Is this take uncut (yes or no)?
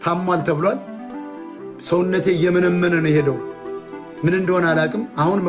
yes